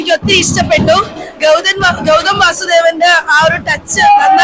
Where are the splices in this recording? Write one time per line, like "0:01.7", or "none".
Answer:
none